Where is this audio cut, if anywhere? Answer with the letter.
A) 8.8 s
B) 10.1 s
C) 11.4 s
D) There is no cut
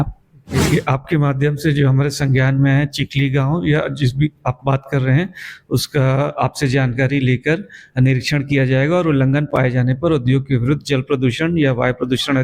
D